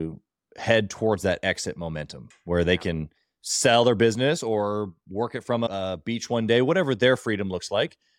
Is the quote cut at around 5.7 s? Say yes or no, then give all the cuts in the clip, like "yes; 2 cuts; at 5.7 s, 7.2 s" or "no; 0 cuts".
yes; 1 cut; at 5.7 s